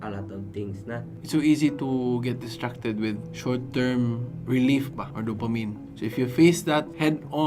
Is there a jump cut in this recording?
yes; 1 cut; at 1.1 s

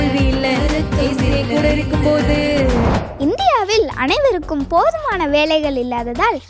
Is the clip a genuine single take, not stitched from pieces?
no; 1 cut; at 3.0 s

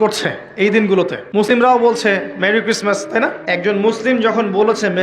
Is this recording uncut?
no; 2 cuts; at 1.5 s, 3.5 s

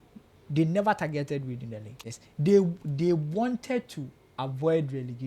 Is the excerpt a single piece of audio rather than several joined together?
no; 1 cut; at 1.9 s

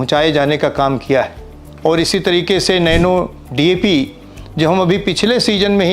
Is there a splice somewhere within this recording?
no; 0 cuts

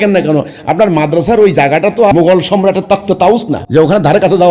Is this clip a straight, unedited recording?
no; 2 cuts; at 2.1 s, 3.6 s

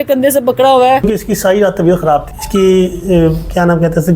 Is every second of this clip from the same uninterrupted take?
no; 1 cut; at 1.1 s

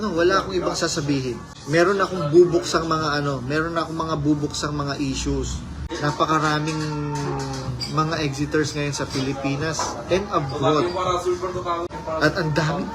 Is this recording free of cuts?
no; 3 cuts; at 1.5 s, 5.9 s, 11.9 s

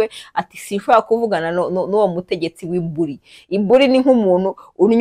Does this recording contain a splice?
no; 0 cuts

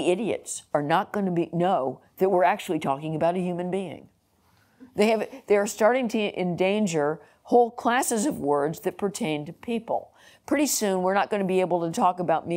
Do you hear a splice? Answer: no; 0 cuts

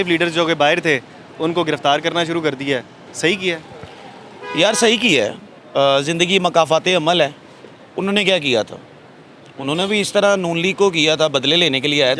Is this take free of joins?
yes; 0 cuts

